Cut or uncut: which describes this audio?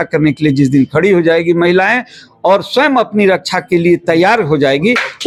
uncut